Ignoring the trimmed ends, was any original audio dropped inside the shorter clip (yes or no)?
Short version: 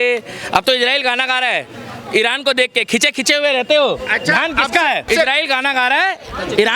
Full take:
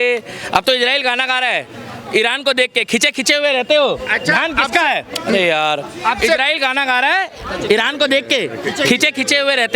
yes